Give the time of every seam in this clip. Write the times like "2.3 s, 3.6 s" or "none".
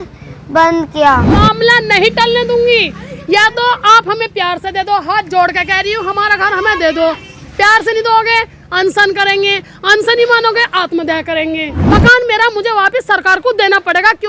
1.3 s, 11.8 s